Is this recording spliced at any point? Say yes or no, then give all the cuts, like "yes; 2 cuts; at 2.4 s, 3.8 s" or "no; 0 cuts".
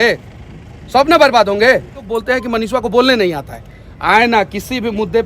yes; 1 cut; at 2.1 s